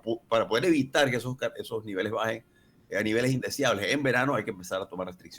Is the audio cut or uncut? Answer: uncut